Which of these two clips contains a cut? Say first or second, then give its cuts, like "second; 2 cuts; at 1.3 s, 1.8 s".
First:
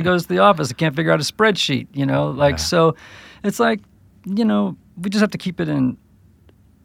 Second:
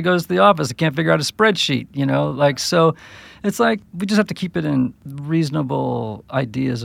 second; 2 cuts; at 3.9 s, 5.1 s